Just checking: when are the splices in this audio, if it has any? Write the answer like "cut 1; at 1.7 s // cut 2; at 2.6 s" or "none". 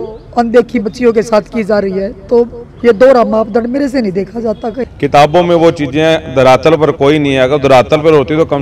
cut 1; at 4.8 s